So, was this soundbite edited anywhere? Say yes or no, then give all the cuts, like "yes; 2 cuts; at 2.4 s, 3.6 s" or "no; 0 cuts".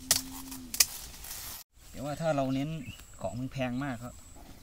yes; 1 cut; at 1.5 s